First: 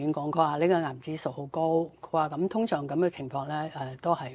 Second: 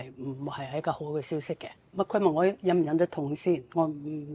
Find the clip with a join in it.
second; 1 cut; at 1.8 s

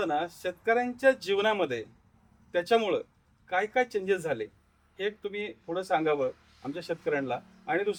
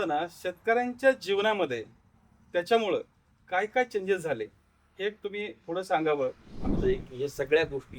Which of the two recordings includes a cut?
second; 1 cut; at 6.7 s

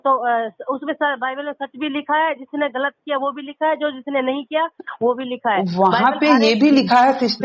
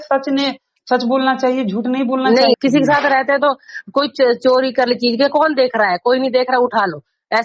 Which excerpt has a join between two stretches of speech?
second; 1 cut; at 2.6 s

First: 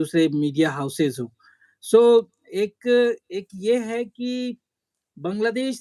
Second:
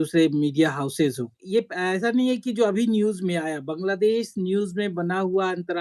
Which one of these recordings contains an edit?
second; 1 cut; at 1.3 s

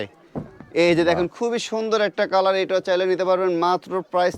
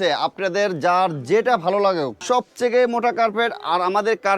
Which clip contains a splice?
second; 1 cut; at 2.2 s

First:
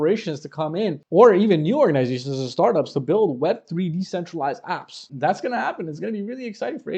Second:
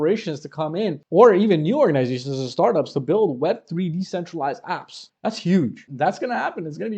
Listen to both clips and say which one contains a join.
second; 2 cuts; at 5.0 s, 5.8 s

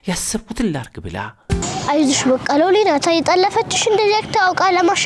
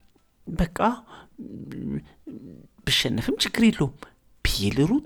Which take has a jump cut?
first; 1 cut; at 1.5 s

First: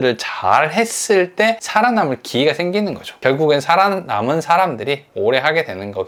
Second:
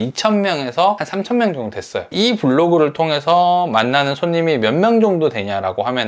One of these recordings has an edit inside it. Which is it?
second; 2 cuts; at 1.0 s, 2.1 s

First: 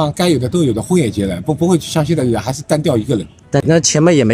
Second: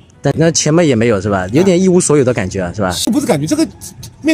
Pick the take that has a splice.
second; 1 cut; at 3.1 s

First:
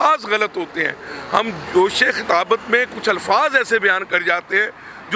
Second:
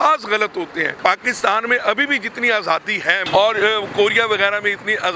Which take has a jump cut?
second; 2 cuts; at 0.9 s, 3.2 s

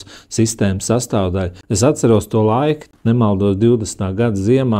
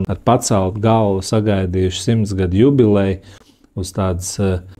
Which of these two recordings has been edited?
first; 2 cuts; at 1.6 s, 2.8 s

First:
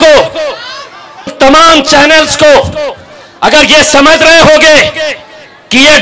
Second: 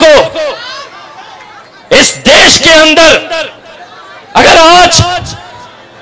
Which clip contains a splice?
first; 1 cut; at 1.3 s

